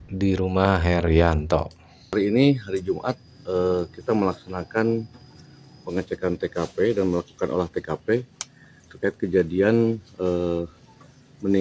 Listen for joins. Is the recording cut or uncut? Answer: uncut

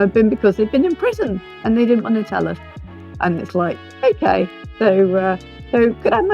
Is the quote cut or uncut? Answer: uncut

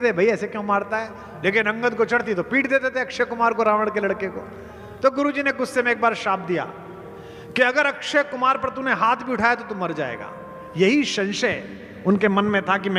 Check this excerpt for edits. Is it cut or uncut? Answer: uncut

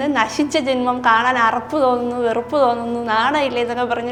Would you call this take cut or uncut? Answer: uncut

